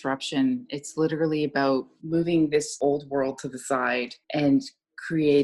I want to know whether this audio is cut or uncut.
cut